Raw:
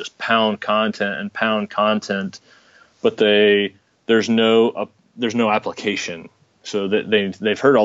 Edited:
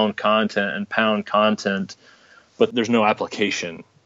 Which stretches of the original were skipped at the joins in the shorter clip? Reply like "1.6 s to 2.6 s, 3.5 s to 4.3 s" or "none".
3.1 s to 5.2 s